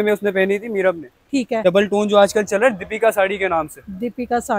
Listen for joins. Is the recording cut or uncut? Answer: cut